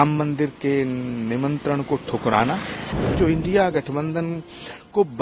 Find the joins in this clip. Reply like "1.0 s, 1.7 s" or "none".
3.1 s